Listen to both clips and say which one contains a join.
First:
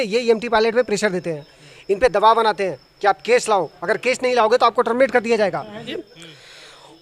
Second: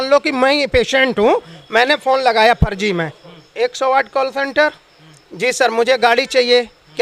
first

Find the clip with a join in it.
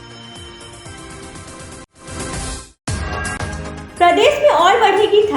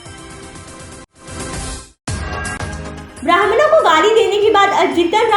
second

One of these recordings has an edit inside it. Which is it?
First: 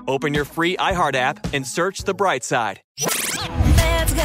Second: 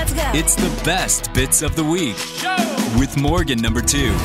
first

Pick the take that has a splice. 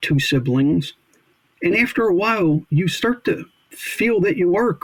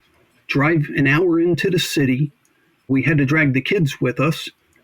second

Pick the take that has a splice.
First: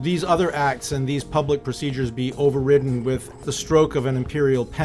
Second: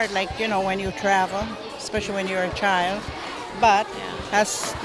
first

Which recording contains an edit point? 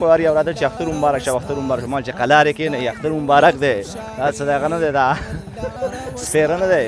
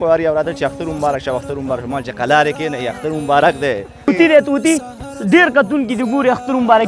second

